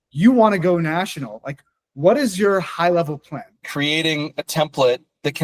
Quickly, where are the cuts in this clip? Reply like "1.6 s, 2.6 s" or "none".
3.6 s